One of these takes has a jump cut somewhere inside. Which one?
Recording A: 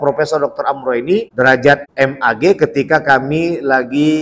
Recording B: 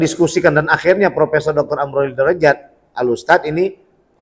A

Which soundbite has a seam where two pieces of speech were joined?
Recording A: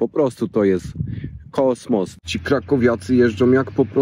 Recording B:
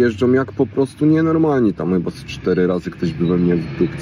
A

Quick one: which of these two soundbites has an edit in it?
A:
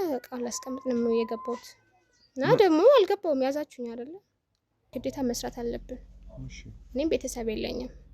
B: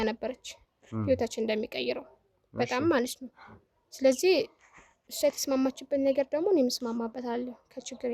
A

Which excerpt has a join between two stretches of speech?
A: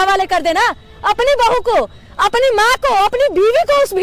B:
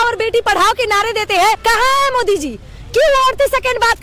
B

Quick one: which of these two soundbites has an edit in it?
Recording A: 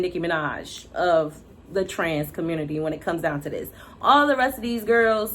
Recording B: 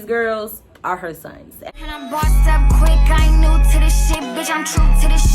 B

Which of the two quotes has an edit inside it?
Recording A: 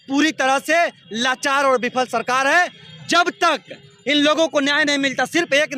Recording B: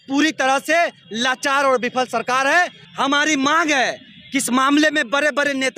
B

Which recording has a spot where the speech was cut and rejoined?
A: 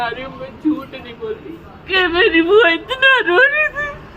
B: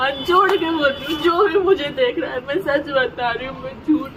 A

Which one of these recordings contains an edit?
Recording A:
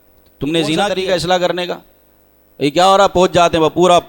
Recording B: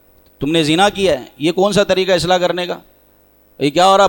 A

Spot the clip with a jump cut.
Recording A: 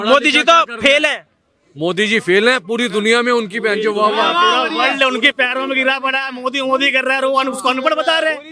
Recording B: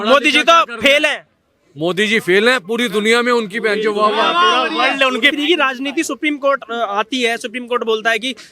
B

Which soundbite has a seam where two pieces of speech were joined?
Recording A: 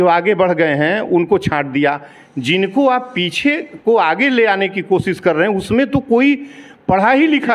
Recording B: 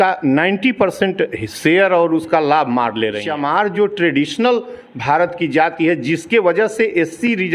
B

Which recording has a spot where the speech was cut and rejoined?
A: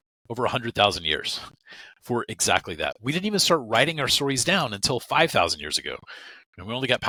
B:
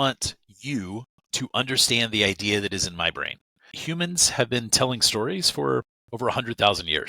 B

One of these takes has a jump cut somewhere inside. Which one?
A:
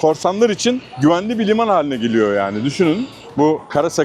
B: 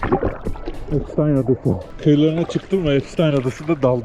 B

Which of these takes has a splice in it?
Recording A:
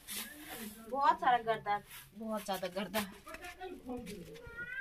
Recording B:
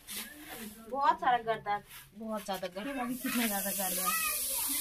B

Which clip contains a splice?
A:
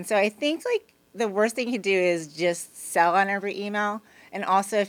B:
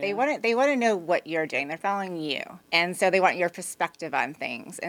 B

